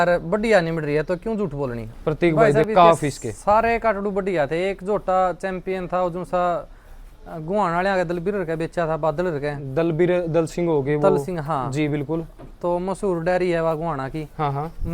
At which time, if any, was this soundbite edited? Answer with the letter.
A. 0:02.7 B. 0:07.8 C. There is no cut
A